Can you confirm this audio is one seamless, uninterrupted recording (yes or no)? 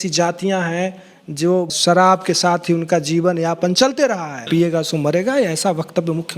no